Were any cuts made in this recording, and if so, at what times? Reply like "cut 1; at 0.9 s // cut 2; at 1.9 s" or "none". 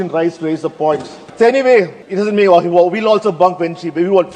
cut 1; at 1.2 s // cut 2; at 2.0 s